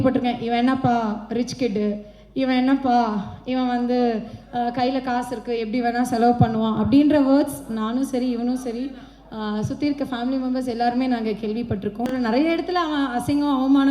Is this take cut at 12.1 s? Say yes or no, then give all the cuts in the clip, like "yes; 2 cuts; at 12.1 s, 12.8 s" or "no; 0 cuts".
yes; 1 cut; at 12.1 s